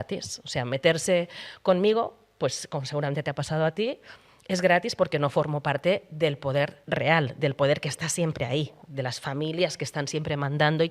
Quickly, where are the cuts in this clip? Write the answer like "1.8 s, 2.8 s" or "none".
6.8 s